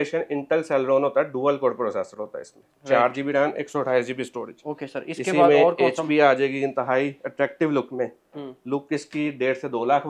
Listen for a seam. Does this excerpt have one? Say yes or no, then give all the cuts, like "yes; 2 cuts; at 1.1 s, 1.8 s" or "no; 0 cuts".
no; 0 cuts